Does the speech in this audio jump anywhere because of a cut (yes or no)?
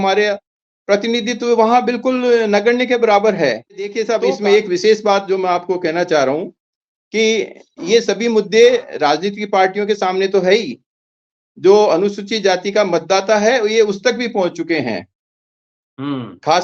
yes